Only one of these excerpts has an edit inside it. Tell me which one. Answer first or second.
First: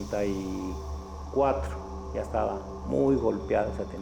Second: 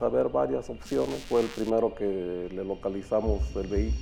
first